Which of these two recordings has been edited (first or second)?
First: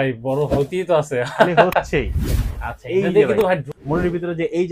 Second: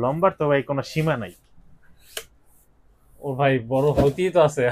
first